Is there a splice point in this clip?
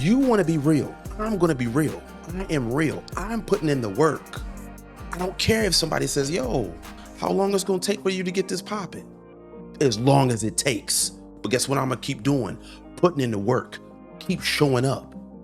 yes; 1 cut; at 1.0 s

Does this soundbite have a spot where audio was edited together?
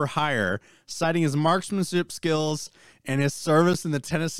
no; 0 cuts

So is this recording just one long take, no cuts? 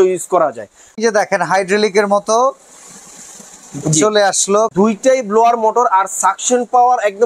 no; 2 cuts; at 1.0 s, 4.7 s

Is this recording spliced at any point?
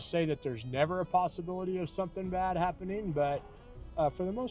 no; 0 cuts

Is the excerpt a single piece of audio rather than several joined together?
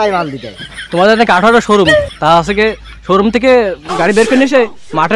yes; 0 cuts

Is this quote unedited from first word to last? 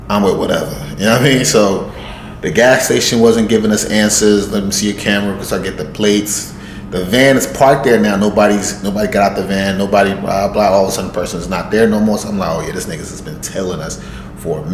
yes; 0 cuts

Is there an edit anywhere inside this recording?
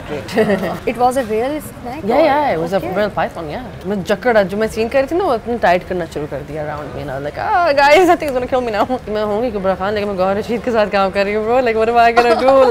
yes; 3 cuts; at 0.8 s, 3.7 s, 9.1 s

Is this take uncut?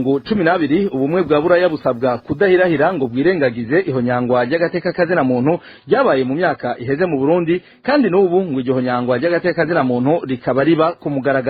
yes; 0 cuts

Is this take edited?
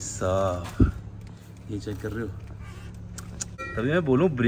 yes; 1 cut; at 3.5 s

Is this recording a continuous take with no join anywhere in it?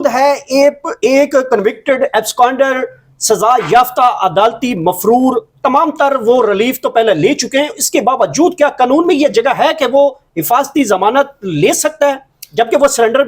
yes; 0 cuts

